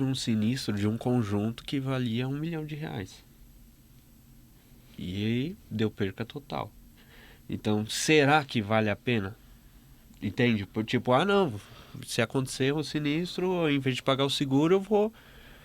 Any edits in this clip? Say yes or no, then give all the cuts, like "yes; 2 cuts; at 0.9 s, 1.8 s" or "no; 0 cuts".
no; 0 cuts